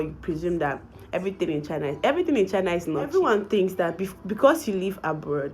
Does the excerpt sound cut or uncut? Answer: cut